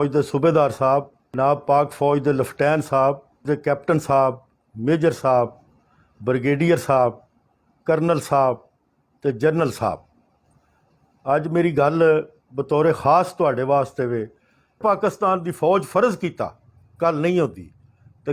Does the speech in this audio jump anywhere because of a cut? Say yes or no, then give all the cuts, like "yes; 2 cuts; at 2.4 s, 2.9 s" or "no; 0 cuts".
yes; 3 cuts; at 1.3 s, 3.4 s, 14.8 s